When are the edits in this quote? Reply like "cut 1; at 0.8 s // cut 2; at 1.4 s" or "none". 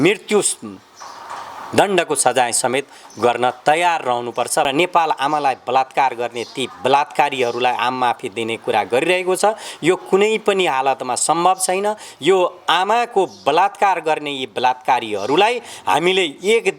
cut 1; at 4.7 s